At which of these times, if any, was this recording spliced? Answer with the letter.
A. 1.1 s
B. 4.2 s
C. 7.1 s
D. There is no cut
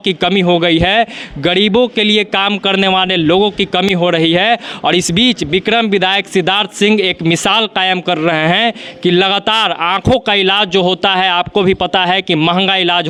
D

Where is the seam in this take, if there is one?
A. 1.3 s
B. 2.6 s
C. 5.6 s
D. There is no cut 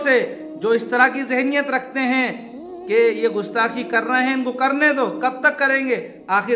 D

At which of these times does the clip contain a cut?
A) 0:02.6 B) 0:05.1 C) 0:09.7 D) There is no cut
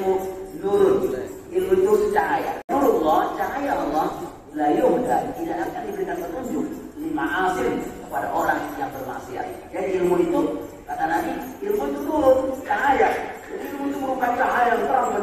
A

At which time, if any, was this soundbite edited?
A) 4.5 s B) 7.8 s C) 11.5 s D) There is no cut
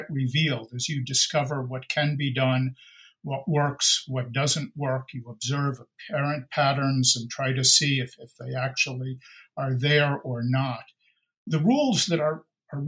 C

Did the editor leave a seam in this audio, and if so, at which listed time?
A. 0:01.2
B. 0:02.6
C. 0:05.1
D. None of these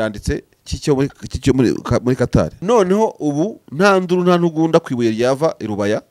B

